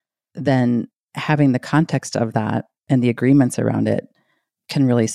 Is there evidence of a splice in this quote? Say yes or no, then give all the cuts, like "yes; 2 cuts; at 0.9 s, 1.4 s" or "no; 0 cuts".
yes; 1 cut; at 2.7 s